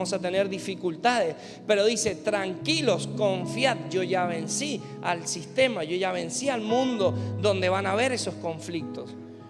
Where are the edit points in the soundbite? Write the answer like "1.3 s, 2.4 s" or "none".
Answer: none